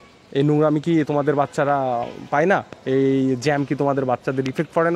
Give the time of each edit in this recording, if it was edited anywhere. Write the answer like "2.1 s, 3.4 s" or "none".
none